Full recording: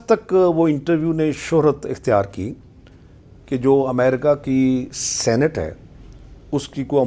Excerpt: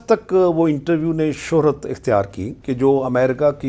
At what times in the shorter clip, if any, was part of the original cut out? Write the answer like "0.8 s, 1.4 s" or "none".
2.5 s